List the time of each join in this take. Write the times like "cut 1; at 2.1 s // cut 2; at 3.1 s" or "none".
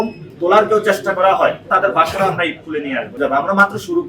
cut 1; at 1.7 s // cut 2; at 3.2 s